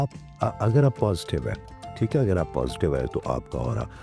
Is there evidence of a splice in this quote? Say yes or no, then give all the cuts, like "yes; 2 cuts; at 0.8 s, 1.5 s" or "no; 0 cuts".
no; 0 cuts